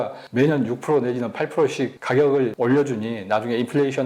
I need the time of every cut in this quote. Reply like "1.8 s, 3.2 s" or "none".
2.0 s, 2.5 s

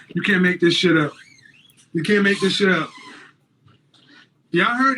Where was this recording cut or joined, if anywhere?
none

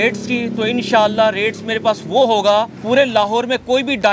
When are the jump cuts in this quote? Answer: 2.8 s

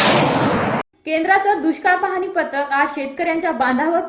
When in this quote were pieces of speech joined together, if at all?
0.9 s

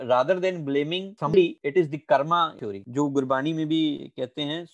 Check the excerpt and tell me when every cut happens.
1.3 s

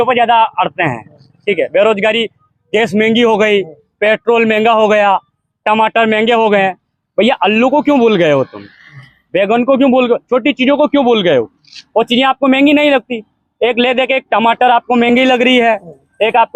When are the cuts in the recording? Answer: none

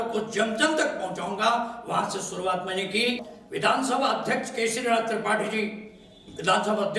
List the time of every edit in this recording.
3.3 s

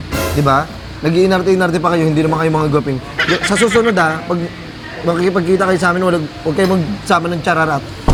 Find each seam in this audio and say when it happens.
none

